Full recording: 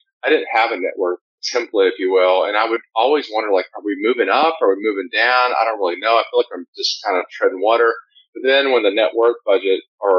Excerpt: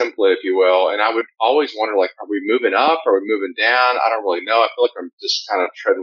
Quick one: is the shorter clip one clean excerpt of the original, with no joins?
yes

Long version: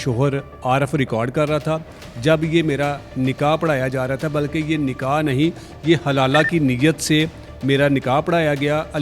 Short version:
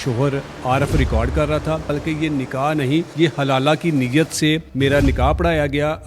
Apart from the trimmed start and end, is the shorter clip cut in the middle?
yes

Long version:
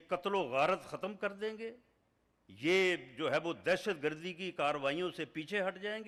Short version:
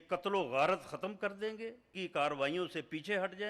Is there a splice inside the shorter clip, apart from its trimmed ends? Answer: yes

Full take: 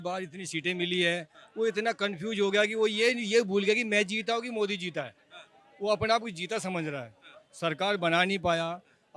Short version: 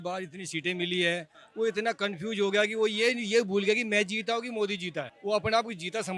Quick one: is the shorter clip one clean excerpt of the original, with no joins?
no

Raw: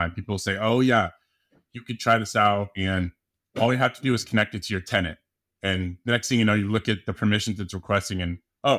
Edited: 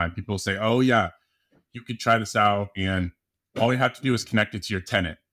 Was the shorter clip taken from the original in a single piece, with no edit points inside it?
yes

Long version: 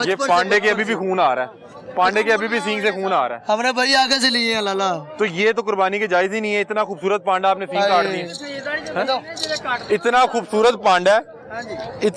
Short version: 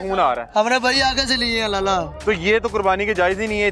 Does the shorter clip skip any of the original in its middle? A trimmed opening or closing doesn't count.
no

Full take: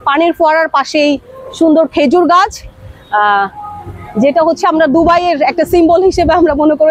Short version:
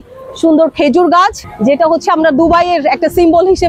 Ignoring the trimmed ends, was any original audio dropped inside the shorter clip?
yes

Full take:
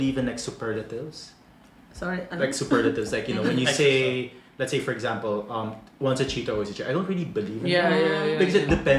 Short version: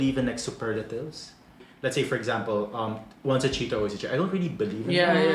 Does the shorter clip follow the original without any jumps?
no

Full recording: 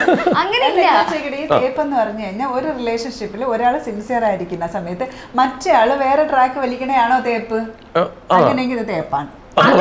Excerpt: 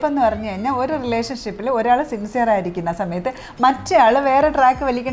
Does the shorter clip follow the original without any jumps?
yes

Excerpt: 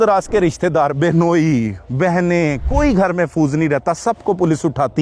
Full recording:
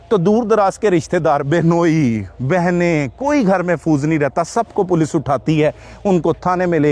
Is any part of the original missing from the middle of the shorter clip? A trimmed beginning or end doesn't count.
no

